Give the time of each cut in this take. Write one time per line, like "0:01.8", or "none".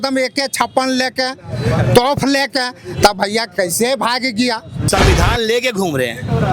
0:04.8